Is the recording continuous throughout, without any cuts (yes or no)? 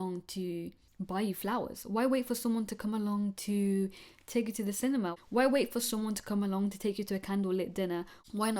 yes